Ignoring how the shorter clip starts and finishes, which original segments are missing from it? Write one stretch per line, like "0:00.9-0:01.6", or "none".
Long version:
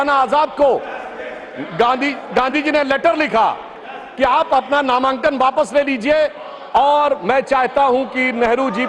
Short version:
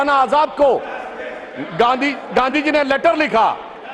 none